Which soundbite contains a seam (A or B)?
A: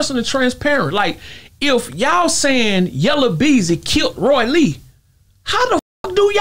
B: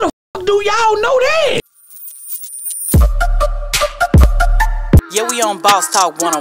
B